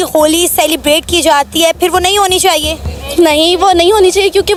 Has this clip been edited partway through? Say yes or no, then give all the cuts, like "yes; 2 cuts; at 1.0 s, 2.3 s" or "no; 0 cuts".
no; 0 cuts